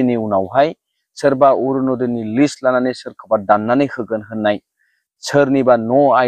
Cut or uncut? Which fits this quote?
uncut